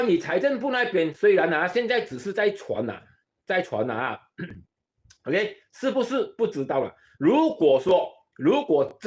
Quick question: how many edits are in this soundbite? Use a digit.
0